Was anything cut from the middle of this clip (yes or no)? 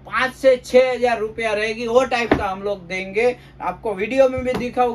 no